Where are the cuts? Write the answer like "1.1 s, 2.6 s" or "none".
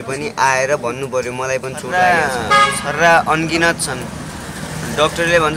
1.8 s

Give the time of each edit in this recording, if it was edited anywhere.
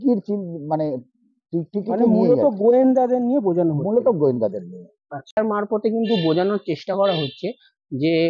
5.4 s

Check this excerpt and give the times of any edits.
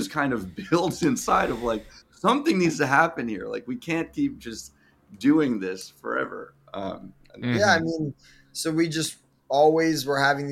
none

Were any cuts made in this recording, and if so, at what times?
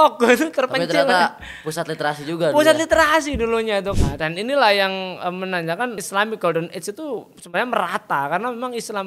3.9 s, 6.0 s

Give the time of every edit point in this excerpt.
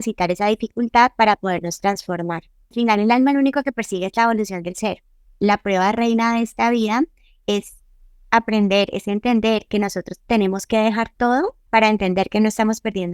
2.7 s, 5.3 s, 11.6 s

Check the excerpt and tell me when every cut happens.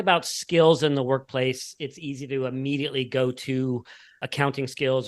none

